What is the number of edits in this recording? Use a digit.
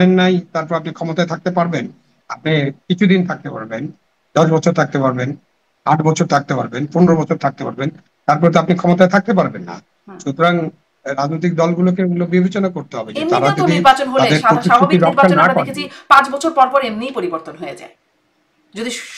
0